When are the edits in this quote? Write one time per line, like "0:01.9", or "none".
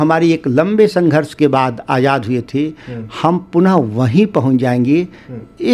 none